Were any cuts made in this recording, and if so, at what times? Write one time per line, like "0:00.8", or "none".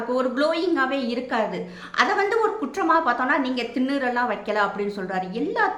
none